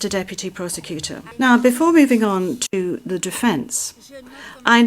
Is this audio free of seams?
no; 1 cut; at 1.3 s

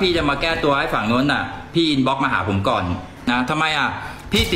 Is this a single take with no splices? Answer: no; 1 cut; at 3.1 s

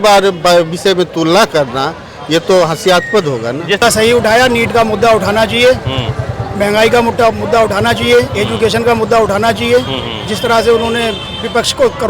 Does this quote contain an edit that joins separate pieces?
yes; 1 cut; at 3.8 s

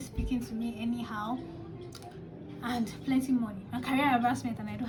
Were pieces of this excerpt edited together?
no; 0 cuts

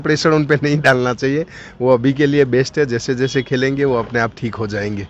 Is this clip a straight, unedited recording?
yes; 0 cuts

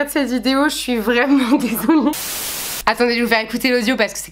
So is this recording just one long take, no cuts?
no; 1 cut; at 2.3 s

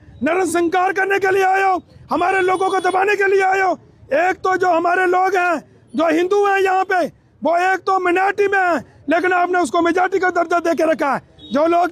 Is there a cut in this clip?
no; 0 cuts

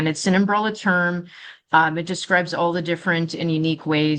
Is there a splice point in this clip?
no; 0 cuts

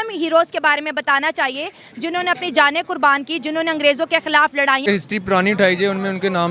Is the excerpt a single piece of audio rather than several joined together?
no; 1 cut; at 4.9 s

